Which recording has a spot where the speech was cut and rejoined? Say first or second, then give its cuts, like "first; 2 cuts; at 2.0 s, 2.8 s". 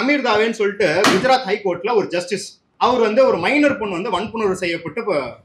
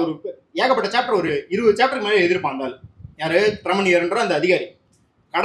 first; 1 cut; at 2.6 s